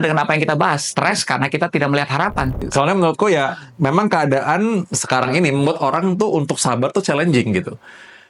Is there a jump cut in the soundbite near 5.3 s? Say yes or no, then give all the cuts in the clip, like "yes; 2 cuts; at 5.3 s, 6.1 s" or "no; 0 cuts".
no; 1 cut; at 2.6 s